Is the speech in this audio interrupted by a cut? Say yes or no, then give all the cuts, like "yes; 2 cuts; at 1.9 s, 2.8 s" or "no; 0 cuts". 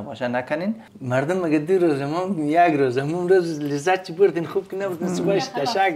yes; 1 cut; at 0.9 s